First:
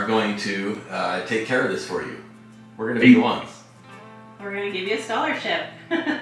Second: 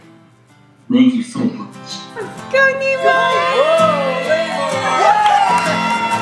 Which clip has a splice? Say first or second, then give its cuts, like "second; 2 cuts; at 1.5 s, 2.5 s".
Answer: second; 1 cut; at 2.0 s